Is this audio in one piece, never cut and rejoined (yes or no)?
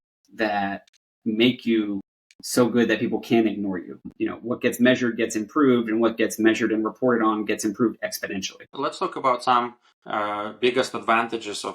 no